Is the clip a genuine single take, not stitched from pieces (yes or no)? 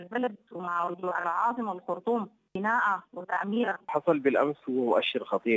no